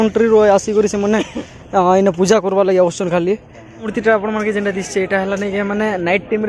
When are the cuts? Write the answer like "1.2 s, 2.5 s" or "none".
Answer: 3.9 s